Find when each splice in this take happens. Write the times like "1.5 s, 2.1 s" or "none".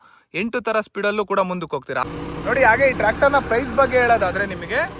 2.0 s